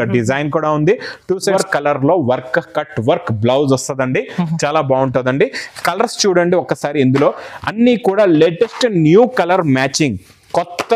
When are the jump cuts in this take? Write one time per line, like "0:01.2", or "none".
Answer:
0:01.5